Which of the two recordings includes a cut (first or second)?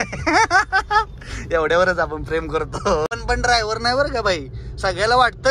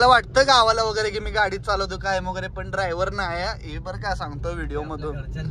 first